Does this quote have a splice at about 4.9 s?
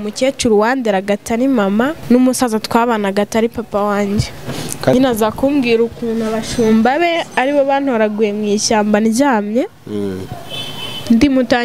yes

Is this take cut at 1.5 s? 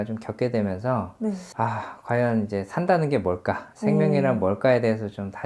yes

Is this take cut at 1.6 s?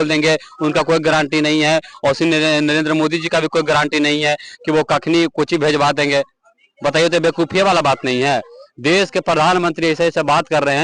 no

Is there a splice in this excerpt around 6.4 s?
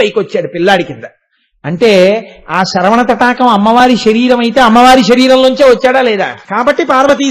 yes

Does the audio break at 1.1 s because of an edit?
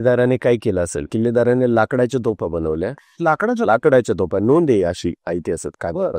yes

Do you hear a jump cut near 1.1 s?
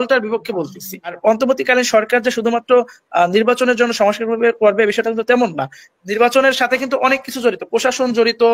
yes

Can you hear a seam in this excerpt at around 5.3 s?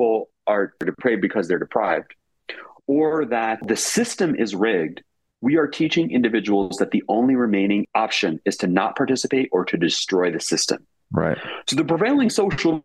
no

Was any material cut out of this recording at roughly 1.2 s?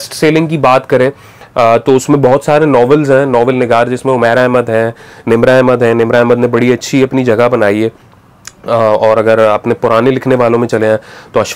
no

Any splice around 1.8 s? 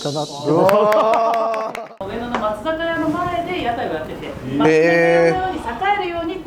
yes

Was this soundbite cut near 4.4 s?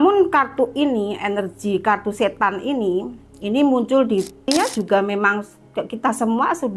yes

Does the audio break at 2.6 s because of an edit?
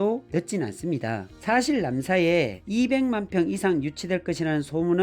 no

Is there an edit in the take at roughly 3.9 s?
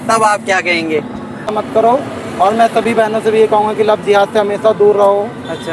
no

